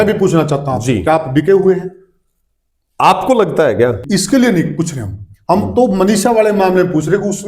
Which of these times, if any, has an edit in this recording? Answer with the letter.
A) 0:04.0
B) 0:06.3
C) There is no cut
A